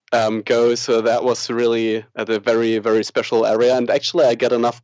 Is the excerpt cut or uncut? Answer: uncut